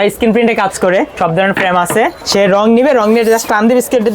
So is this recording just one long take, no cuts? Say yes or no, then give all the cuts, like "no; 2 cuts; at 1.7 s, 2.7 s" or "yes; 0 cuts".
no; 2 cuts; at 1.1 s, 2.2 s